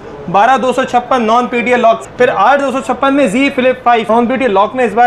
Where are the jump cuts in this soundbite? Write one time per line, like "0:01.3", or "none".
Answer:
0:02.0
0:04.1